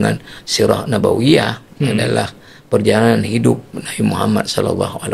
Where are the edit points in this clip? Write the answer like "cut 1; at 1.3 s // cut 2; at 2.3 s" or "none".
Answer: none